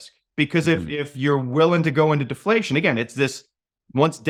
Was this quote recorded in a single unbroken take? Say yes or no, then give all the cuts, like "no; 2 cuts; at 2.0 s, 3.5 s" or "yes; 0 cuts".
yes; 0 cuts